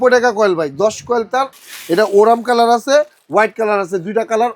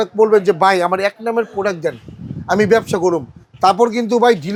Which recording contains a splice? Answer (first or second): first